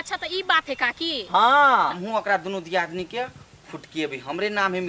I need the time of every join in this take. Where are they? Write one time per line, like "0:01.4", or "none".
0:02.0